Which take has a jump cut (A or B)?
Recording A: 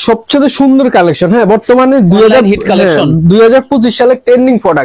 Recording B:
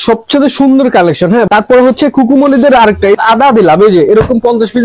B